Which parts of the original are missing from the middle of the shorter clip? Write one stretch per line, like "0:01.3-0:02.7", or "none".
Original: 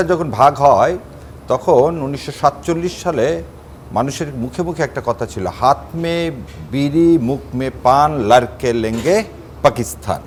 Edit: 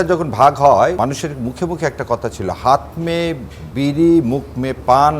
0:01.0-0:03.9